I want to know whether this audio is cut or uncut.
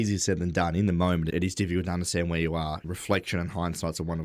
cut